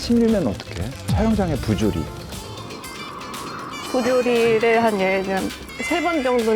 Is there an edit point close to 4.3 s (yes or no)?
no